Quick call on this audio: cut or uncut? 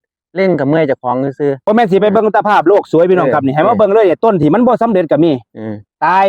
cut